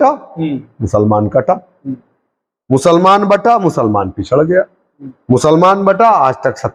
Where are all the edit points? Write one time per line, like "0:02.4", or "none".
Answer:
none

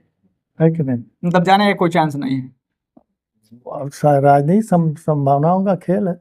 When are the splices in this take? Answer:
none

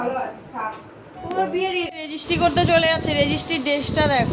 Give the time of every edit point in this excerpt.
0:01.9

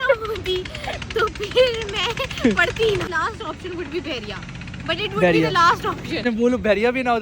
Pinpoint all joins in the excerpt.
0:03.1
0:06.2

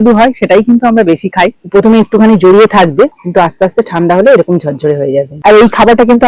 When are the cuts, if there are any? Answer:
0:01.5
0:05.3

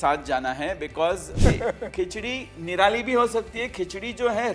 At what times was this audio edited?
0:01.3

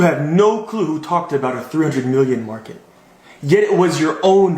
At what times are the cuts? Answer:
none

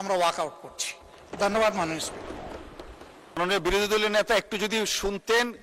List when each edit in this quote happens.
0:03.4

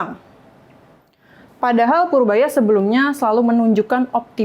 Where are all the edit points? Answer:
0:01.5

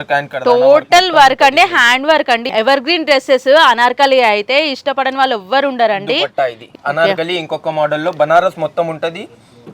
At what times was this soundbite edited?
0:02.5
0:06.7

